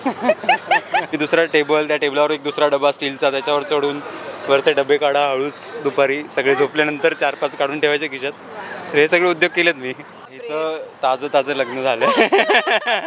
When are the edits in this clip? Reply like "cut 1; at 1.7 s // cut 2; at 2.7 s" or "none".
cut 1; at 1.1 s // cut 2; at 10.3 s